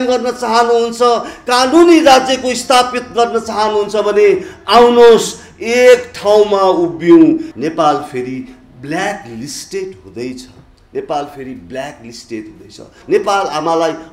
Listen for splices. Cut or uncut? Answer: cut